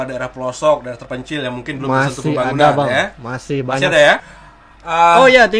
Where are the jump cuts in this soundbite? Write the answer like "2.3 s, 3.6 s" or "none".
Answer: 4.2 s